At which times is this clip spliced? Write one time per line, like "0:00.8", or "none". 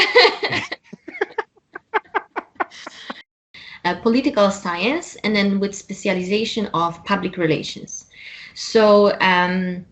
0:03.5